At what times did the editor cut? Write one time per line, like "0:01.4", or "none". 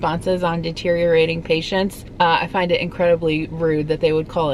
0:02.0